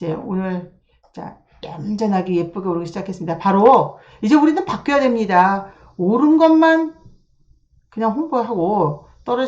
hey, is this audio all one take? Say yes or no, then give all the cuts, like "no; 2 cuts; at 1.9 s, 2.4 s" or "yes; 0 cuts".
yes; 0 cuts